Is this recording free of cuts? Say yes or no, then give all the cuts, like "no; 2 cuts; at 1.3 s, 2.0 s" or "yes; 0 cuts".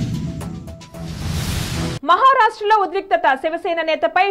no; 1 cut; at 2.0 s